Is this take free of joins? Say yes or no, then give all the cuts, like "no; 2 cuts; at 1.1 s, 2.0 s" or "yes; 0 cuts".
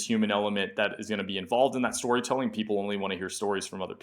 yes; 0 cuts